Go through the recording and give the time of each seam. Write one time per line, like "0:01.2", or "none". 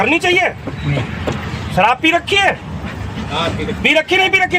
0:01.1